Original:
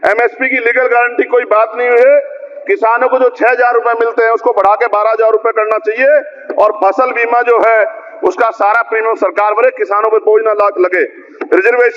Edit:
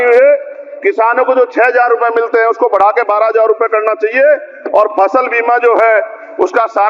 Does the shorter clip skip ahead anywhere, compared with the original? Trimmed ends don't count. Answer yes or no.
no